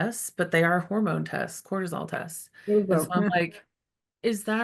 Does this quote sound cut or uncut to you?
uncut